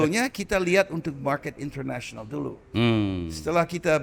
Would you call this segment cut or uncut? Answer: uncut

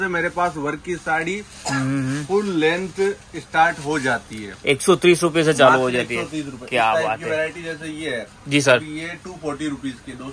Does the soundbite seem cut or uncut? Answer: uncut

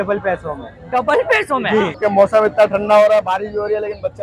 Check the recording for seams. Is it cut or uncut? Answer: cut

